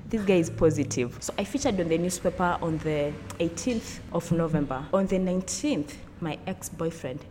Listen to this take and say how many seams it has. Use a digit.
3